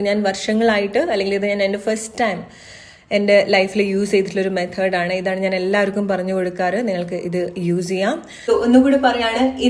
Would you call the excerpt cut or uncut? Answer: cut